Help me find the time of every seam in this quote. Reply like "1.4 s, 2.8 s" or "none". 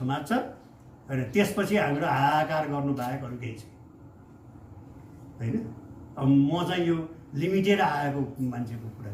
none